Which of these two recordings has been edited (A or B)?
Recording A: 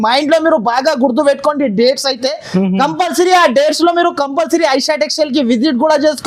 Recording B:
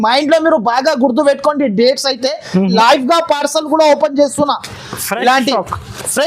B